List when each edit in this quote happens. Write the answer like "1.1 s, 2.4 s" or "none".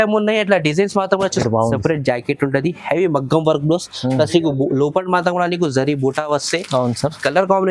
1.4 s

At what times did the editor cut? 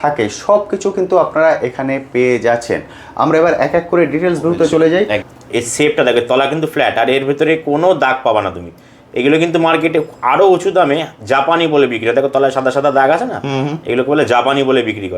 5.3 s

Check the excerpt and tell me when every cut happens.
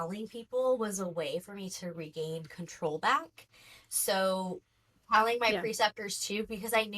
none

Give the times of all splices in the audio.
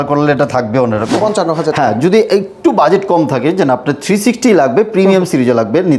1.1 s

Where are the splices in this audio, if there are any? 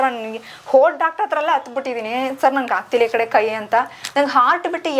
none

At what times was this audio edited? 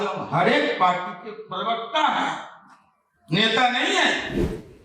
none

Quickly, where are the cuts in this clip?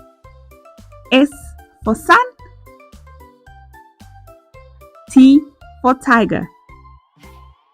1.1 s, 2.3 s, 4.5 s, 6.5 s

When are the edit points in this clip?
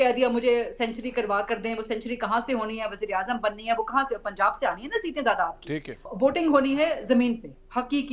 6.0 s

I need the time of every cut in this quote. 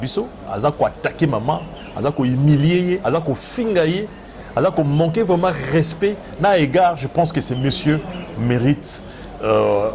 none

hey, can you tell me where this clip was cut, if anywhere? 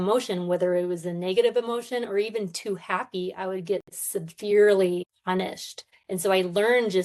5.7 s

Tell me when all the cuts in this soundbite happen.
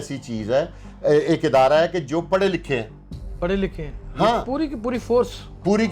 none

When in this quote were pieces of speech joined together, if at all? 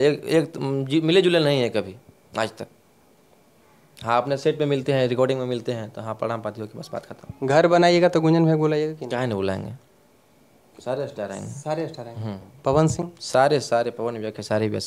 none

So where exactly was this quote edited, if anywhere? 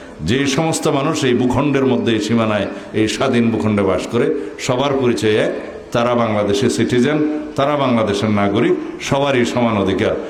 none

